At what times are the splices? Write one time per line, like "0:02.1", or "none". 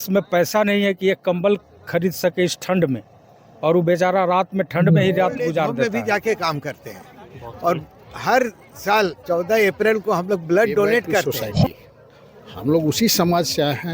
0:05.8
0:11.7